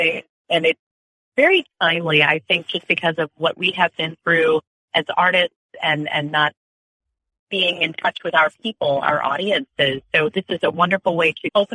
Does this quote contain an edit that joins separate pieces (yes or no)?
no